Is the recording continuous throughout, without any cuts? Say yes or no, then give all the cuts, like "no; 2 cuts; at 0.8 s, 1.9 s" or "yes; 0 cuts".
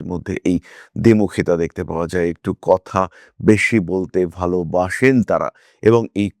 yes; 0 cuts